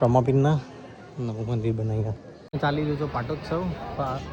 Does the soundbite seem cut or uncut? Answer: cut